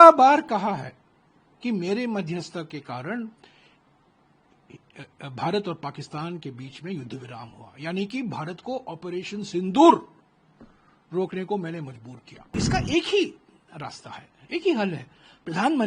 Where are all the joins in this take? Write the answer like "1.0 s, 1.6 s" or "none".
12.5 s